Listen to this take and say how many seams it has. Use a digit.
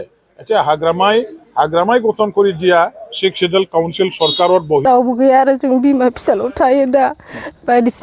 1